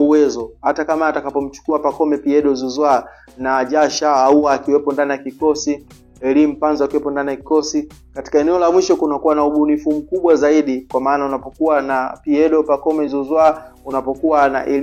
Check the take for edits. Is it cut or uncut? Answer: uncut